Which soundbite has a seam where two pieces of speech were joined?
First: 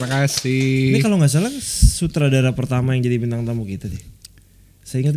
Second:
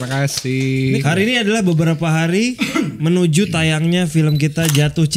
second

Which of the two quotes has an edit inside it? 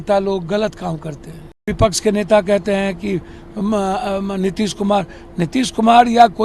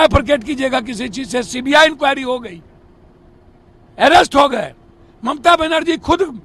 first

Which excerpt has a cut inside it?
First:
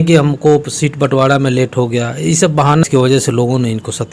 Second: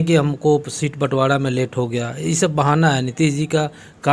first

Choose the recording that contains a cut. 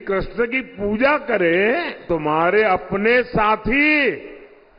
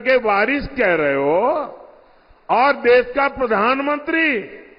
first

